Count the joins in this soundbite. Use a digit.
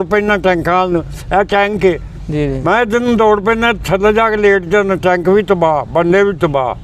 0